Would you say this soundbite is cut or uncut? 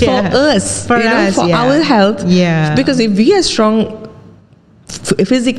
uncut